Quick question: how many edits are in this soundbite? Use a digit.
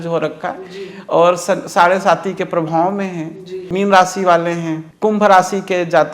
2